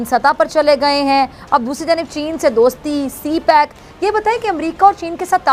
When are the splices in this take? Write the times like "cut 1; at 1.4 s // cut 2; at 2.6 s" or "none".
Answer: none